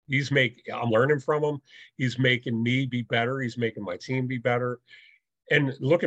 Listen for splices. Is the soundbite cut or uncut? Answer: uncut